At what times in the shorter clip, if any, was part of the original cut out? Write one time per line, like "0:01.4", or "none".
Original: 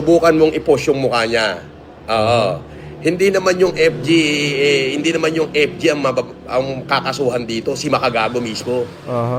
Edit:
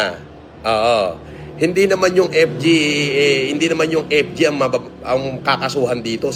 none